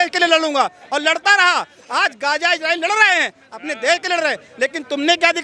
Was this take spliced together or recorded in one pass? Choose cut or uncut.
uncut